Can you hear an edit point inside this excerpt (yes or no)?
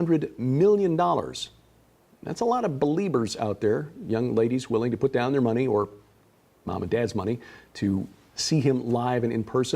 yes